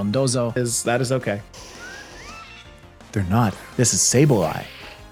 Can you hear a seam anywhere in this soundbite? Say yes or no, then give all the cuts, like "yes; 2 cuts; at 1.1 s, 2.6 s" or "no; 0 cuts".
no; 0 cuts